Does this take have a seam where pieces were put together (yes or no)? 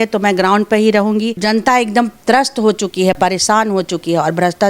yes